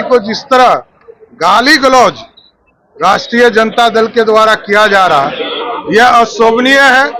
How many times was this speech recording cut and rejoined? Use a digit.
0